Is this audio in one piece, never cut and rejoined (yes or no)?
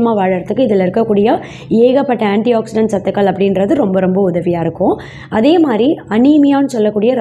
yes